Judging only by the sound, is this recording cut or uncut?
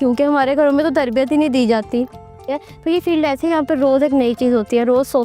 cut